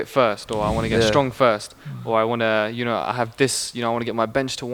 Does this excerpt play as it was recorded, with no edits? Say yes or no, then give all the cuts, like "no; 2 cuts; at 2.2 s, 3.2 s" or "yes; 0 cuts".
yes; 0 cuts